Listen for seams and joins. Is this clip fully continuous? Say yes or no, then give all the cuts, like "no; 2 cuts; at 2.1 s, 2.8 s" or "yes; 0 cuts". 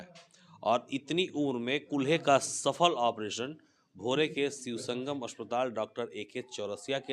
yes; 0 cuts